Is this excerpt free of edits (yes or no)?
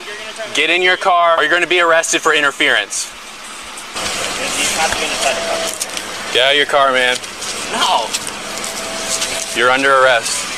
no